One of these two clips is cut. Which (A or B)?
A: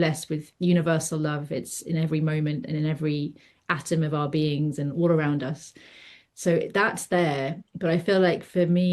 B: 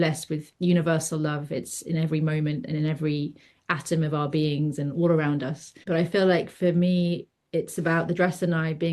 B